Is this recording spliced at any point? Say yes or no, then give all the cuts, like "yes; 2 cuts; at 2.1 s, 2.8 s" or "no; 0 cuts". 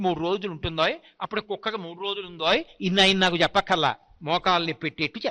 no; 0 cuts